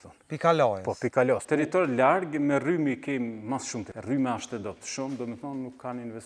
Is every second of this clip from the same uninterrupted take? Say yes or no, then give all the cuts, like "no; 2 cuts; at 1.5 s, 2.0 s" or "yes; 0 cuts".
no; 2 cuts; at 1.4 s, 3.9 s